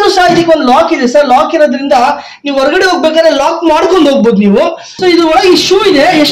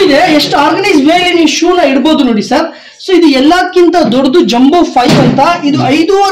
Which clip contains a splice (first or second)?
first